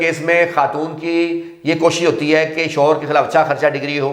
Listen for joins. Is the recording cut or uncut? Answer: uncut